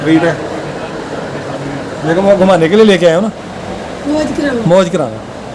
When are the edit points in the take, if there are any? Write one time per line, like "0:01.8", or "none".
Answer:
none